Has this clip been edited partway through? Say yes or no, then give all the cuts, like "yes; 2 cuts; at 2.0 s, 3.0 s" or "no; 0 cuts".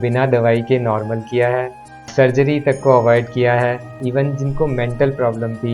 yes; 2 cuts; at 2.0 s, 3.9 s